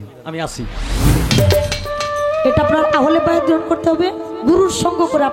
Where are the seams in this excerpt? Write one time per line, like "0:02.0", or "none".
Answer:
0:01.1